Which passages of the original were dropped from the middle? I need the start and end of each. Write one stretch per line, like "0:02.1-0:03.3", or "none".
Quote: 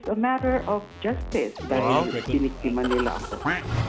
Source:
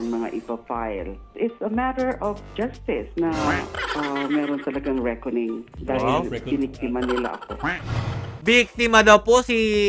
0:03.1-0:05.7